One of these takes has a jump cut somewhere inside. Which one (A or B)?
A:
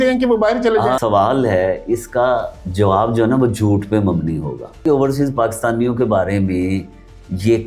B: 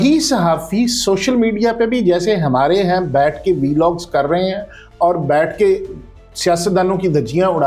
A